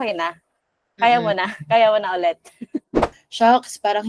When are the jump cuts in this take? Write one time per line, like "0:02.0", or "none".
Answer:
0:03.2